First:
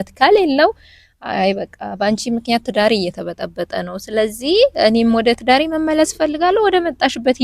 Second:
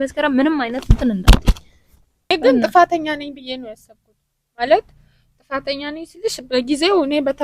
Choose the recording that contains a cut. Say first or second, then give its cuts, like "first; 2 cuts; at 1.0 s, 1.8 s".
second; 1 cut; at 2.3 s